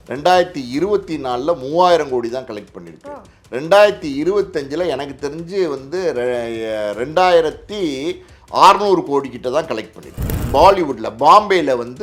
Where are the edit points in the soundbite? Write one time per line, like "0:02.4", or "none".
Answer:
0:10.3